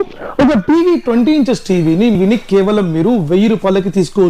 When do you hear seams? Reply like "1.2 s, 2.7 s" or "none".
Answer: 2.2 s

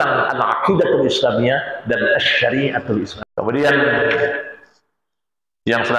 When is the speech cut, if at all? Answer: 3.2 s

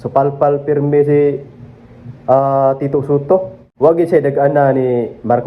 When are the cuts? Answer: 3.6 s

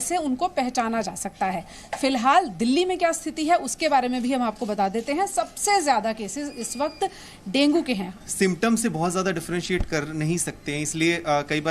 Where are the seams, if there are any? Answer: 8.1 s

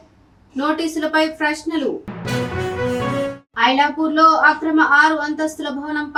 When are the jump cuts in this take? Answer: none

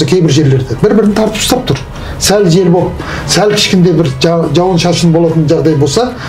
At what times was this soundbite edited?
none

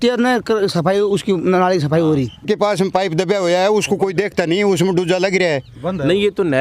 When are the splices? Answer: 2.4 s

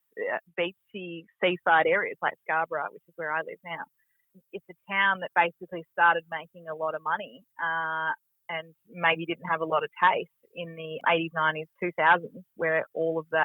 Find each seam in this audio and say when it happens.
4.3 s, 11.0 s

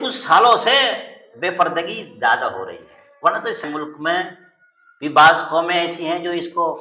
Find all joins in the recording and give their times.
3.6 s

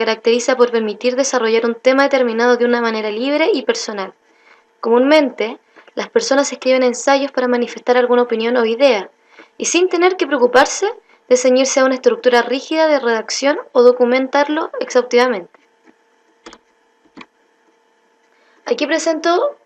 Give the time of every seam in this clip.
none

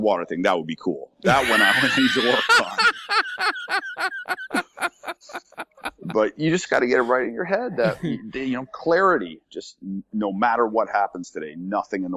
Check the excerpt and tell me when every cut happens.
none

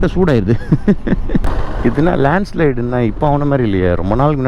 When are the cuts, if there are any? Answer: 1.6 s

